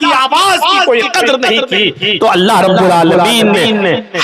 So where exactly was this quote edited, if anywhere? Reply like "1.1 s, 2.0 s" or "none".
none